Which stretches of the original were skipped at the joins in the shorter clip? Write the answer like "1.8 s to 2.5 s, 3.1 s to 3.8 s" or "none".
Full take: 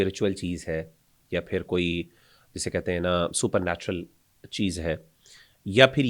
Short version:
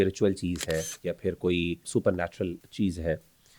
0.9 s to 1.2 s, 2.6 s to 4.1 s